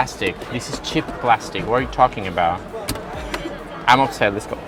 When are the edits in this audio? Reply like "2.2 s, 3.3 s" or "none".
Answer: none

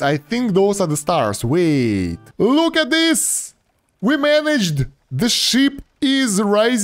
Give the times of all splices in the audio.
2.2 s

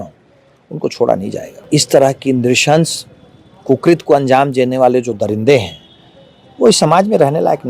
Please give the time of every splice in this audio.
1.5 s

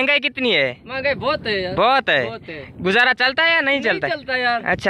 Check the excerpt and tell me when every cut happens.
none

